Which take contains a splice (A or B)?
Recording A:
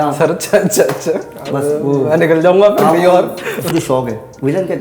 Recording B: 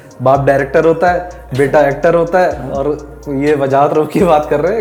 A